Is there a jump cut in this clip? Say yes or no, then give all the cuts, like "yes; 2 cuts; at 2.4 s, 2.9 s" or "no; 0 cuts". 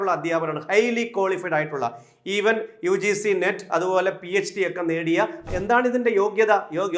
yes; 1 cut; at 5.5 s